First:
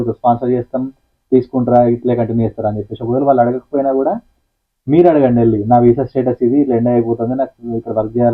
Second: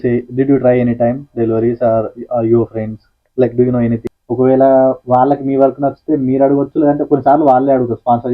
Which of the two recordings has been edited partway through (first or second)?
second